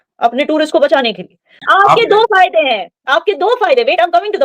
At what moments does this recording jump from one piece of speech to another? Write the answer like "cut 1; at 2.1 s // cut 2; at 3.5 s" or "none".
cut 1; at 1.6 s